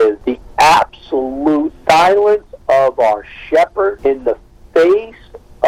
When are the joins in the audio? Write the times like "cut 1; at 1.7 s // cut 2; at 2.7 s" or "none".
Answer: none